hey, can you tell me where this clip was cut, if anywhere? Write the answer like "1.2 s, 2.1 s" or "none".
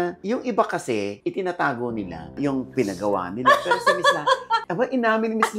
2.3 s, 4.7 s